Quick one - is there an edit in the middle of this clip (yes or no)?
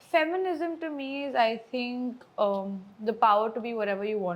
no